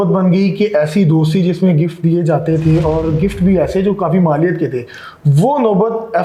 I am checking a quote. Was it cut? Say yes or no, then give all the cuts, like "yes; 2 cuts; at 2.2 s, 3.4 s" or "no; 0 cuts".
no; 0 cuts